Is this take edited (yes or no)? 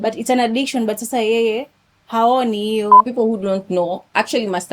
yes